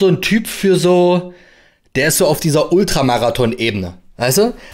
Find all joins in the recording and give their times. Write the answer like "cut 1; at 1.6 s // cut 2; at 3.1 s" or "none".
none